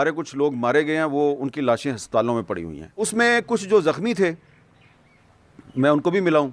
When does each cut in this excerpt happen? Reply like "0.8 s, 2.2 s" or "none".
3.1 s